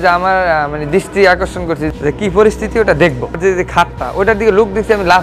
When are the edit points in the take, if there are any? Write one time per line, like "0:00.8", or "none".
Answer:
0:01.8
0:03.4